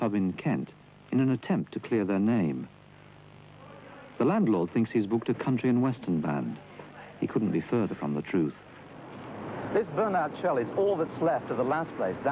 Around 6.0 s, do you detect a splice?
yes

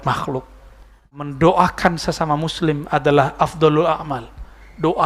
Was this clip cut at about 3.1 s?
no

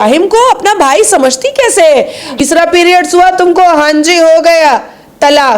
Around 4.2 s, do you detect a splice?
no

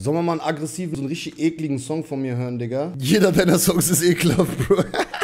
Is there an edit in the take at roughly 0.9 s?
yes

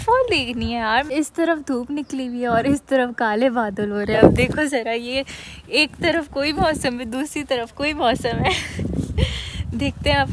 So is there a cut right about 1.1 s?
yes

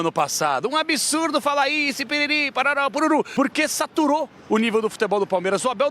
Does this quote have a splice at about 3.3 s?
yes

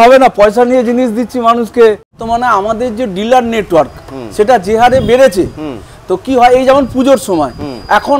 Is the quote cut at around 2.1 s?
yes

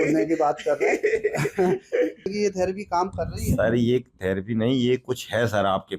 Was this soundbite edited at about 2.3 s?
yes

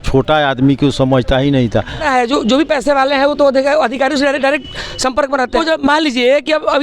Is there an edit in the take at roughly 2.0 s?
yes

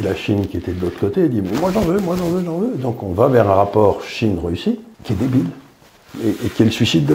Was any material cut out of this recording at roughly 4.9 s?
yes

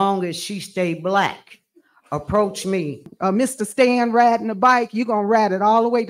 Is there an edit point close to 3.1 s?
yes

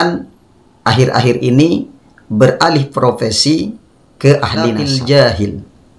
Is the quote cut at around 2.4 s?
no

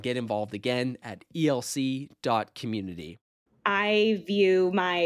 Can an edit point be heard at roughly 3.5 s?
yes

